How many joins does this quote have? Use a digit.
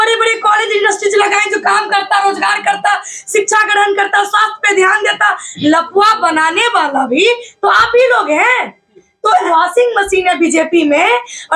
1